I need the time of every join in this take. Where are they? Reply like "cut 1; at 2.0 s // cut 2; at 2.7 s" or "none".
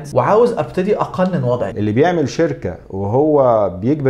cut 1; at 1.7 s